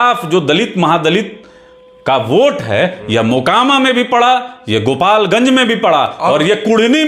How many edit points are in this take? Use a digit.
0